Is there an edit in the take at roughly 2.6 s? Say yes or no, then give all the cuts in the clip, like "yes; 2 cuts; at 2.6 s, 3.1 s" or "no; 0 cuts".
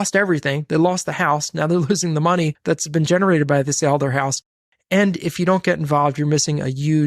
yes; 1 cut; at 2.6 s